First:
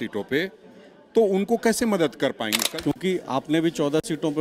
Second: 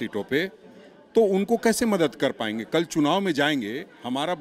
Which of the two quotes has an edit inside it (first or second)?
first